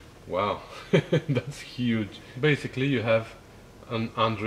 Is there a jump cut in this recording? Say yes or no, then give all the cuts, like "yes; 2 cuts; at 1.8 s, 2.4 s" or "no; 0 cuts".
yes; 1 cut; at 2.2 s